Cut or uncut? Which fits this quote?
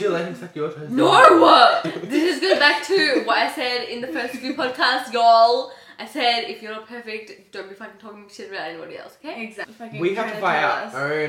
cut